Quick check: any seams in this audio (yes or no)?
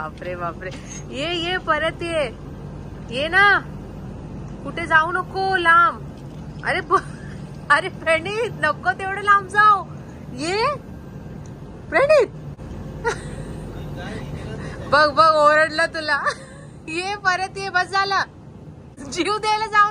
yes